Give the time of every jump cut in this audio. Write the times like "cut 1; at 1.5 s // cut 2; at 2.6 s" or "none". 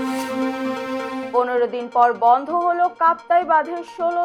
none